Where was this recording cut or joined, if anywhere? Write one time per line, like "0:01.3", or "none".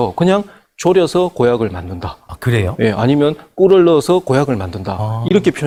none